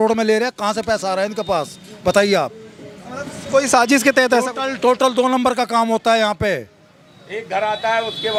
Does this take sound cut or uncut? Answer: uncut